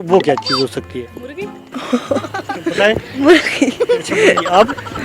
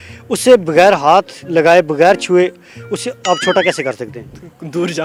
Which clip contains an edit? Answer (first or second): first